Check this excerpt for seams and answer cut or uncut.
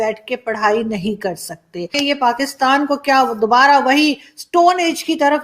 cut